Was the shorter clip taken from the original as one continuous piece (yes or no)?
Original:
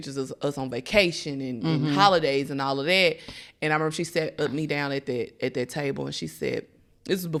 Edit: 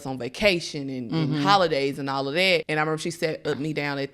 no